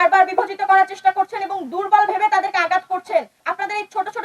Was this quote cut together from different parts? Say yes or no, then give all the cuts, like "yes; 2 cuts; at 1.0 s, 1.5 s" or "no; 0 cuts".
yes; 1 cut; at 3.3 s